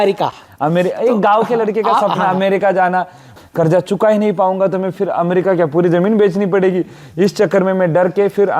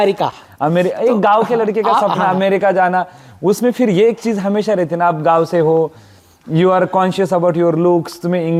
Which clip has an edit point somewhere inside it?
first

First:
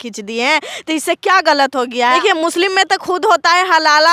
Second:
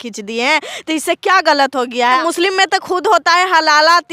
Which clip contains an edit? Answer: second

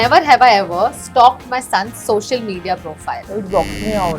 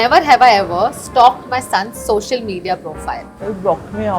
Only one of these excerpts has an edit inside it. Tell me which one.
first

